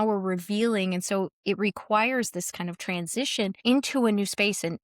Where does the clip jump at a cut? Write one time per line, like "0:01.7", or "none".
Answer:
0:03.6

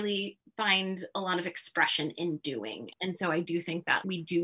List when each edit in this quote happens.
0:02.9

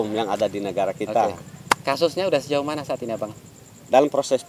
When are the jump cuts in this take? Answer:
none

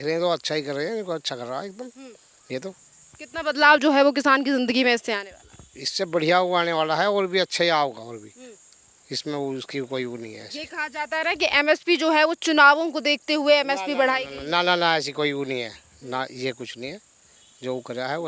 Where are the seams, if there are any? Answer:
none

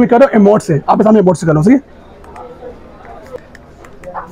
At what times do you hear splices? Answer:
0:03.4

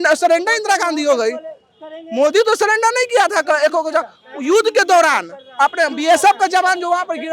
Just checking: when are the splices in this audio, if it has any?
none

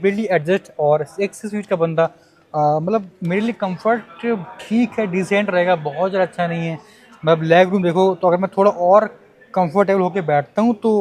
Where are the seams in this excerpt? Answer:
none

